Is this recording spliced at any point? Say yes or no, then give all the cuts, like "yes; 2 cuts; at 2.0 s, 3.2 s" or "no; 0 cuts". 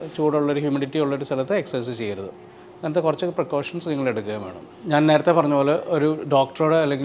no; 0 cuts